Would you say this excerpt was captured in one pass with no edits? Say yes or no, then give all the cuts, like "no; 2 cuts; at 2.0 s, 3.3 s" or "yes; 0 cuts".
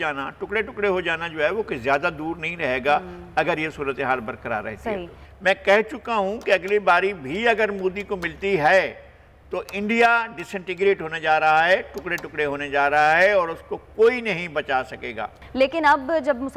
yes; 0 cuts